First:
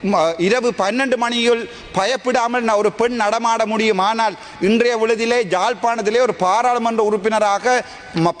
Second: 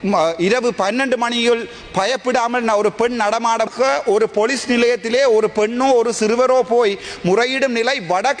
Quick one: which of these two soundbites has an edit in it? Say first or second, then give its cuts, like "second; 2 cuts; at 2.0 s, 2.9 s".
second; 1 cut; at 3.7 s